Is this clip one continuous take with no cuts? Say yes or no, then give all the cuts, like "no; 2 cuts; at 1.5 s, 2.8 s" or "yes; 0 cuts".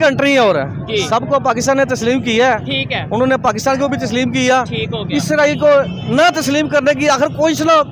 yes; 0 cuts